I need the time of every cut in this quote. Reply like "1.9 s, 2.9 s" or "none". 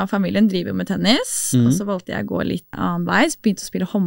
2.7 s